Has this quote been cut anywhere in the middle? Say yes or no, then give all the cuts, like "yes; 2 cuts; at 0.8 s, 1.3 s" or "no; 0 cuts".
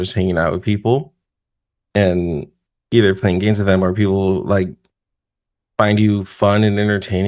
no; 0 cuts